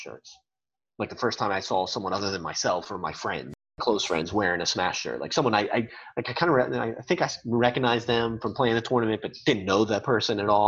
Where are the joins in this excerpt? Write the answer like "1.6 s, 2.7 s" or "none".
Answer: 3.8 s